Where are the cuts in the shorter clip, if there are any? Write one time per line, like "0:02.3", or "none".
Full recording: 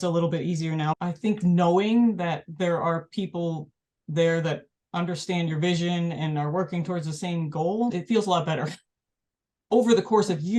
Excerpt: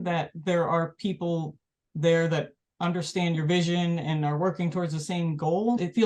none